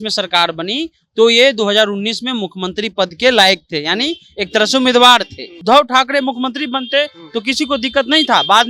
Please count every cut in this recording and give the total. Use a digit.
1